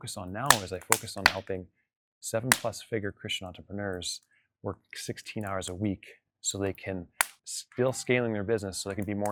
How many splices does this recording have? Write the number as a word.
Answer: zero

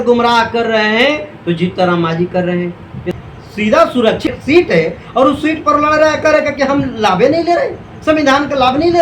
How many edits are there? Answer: two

